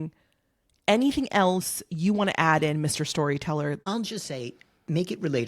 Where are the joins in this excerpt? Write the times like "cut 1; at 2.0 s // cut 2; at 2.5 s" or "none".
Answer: cut 1; at 3.8 s